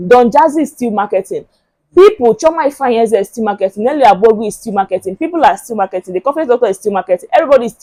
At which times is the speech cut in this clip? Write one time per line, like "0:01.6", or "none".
none